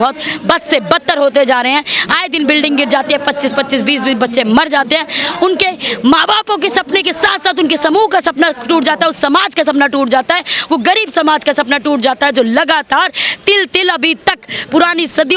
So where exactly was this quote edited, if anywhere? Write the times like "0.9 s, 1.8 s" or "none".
none

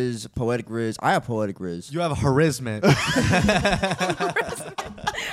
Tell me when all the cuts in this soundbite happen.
none

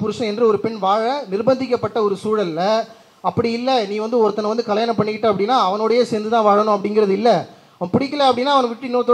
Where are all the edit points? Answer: none

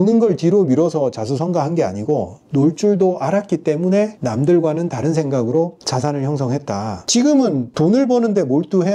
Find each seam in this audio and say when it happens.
4.2 s, 5.8 s, 7.0 s

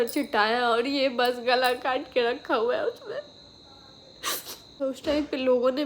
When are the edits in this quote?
4.7 s

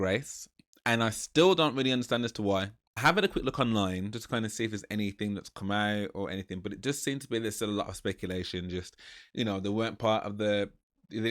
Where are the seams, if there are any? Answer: none

